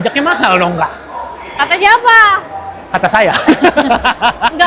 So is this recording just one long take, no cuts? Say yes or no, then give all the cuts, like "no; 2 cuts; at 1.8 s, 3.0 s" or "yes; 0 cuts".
yes; 0 cuts